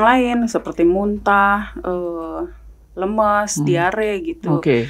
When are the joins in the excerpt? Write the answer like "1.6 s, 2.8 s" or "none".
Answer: none

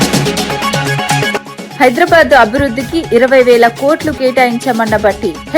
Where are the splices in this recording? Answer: 1.6 s

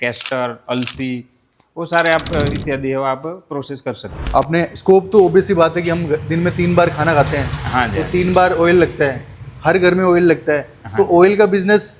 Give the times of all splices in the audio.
4.1 s

